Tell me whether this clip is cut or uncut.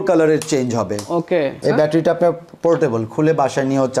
cut